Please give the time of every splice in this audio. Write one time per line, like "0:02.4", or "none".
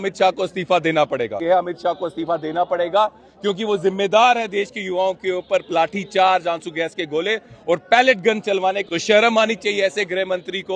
0:01.4
0:08.8